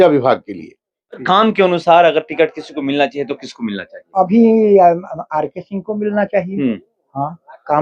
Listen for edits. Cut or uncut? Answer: cut